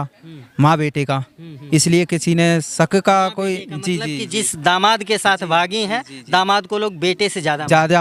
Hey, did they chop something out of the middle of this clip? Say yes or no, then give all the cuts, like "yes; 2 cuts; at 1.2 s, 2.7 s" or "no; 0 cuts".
no; 0 cuts